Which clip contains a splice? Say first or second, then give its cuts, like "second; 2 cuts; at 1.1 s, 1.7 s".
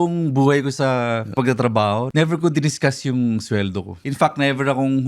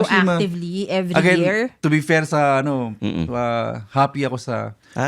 first; 3 cuts; at 1.3 s, 2.1 s, 4.0 s